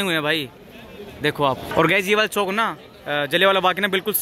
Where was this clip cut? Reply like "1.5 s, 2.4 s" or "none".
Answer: 1.7 s